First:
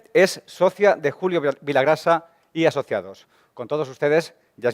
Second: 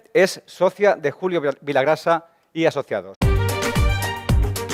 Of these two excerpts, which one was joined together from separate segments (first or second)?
first